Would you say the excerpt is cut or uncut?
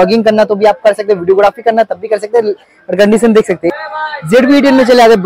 cut